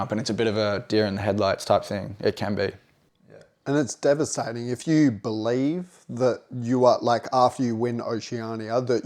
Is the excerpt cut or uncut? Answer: uncut